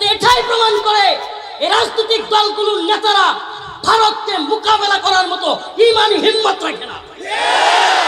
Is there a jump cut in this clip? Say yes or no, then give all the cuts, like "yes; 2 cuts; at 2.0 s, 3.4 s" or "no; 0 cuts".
no; 0 cuts